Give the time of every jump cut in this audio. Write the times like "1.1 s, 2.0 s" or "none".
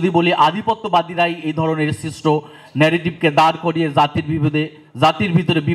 none

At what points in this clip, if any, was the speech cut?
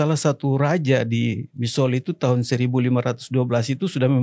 none

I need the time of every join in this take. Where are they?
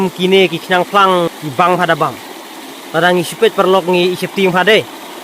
1.3 s

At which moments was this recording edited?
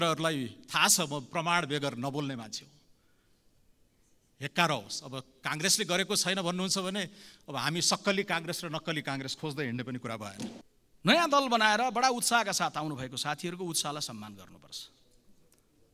10.6 s

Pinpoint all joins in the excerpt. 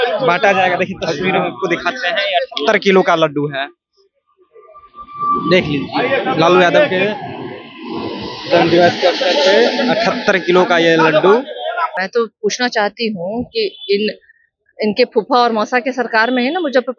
11.9 s

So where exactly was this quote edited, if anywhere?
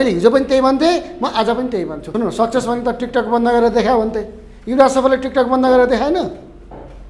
2.0 s

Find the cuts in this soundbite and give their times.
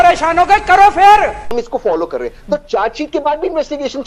1.5 s

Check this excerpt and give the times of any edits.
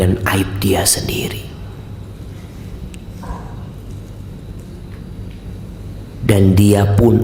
none

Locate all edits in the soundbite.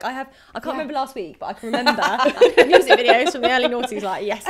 none

